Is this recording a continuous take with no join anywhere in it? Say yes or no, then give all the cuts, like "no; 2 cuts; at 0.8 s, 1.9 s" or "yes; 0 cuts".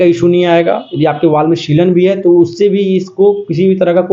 yes; 0 cuts